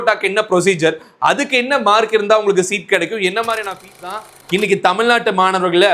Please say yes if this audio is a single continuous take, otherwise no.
no